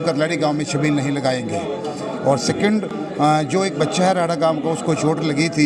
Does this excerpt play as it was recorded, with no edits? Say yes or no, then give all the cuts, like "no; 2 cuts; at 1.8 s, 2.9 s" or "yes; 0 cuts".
yes; 0 cuts